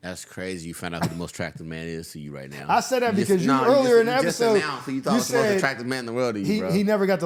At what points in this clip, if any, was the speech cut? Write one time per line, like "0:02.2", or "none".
none